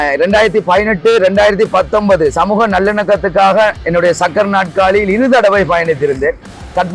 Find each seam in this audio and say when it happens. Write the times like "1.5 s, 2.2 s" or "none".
none